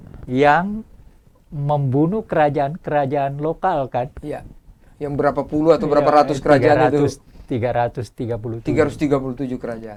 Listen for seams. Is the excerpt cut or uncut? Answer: uncut